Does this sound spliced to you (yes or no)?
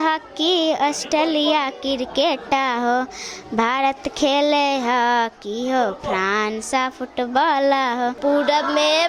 yes